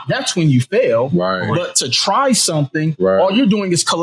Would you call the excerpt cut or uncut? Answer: uncut